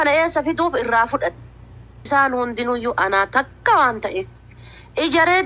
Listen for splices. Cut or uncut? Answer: cut